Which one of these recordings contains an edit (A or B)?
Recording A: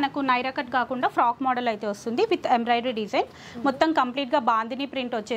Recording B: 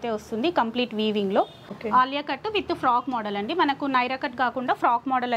B